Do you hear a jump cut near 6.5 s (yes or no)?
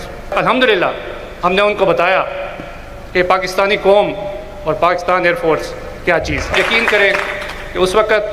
yes